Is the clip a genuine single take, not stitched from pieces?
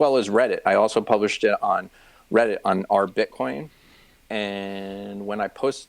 yes; 0 cuts

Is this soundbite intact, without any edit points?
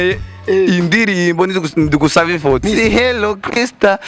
no; 1 cut; at 2.6 s

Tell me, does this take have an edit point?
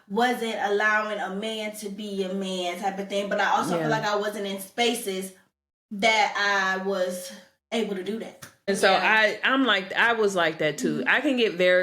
yes; 1 cut; at 8.7 s

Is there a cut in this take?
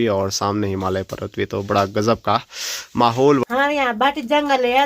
yes; 1 cut; at 3.4 s

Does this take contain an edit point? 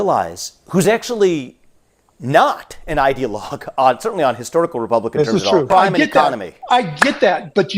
yes; 1 cut; at 5.6 s

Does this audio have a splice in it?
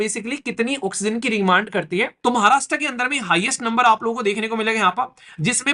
yes; 1 cut; at 2.1 s

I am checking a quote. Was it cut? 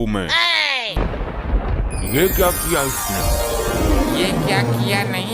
yes; 1 cut; at 1.0 s

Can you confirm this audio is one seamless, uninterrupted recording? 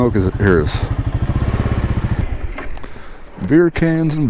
no; 1 cut; at 2.2 s

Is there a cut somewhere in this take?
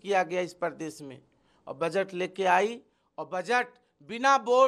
no; 0 cuts

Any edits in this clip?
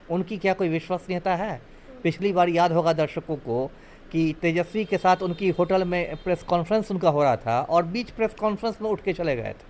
no; 0 cuts

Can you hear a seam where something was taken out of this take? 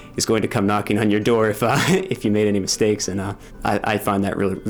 yes; 1 cut; at 3.4 s

